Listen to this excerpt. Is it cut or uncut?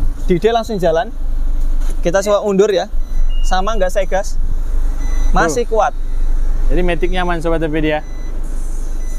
uncut